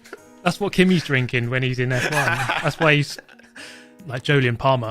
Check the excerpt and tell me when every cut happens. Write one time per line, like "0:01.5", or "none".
0:03.4